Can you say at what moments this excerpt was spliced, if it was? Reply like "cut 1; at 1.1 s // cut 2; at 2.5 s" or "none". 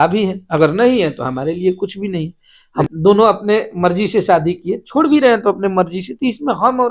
cut 1; at 2.9 s